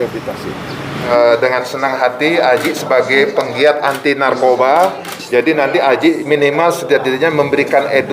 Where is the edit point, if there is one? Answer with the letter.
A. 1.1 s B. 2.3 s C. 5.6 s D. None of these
A